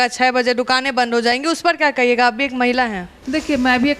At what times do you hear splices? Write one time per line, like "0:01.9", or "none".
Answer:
none